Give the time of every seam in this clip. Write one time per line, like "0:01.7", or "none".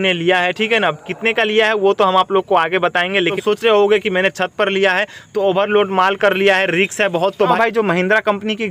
0:03.4
0:07.5